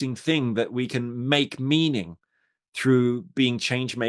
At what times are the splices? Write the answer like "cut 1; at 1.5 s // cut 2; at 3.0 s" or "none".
none